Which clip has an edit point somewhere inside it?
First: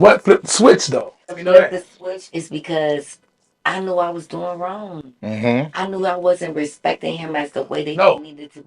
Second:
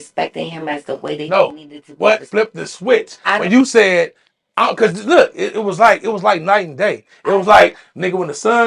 first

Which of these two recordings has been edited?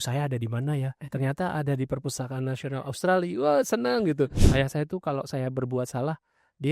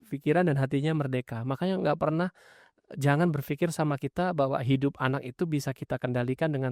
first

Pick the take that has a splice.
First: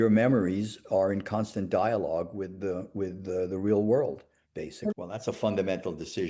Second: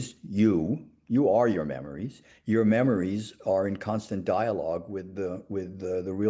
first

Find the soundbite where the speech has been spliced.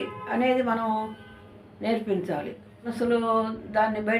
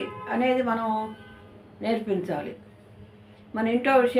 first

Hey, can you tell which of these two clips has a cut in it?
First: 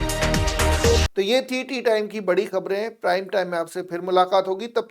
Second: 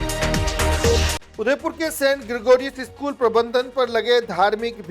second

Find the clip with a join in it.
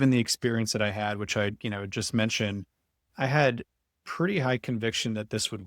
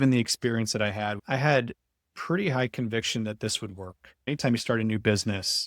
second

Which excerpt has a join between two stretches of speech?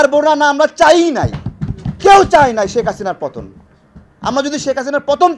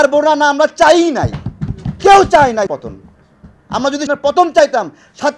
second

